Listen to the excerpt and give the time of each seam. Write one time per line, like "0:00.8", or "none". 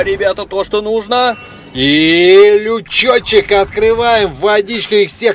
none